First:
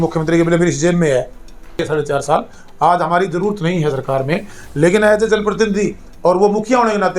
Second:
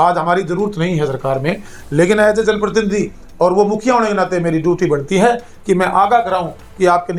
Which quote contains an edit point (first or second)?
first